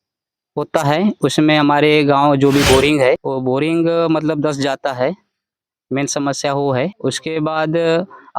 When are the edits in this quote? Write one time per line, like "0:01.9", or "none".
0:03.3
0:07.0